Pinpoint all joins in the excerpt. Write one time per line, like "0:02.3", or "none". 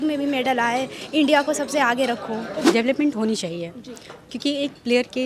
0:02.6